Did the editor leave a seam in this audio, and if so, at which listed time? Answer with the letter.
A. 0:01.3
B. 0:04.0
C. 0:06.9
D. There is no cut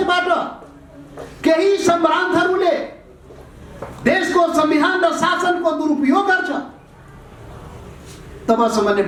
D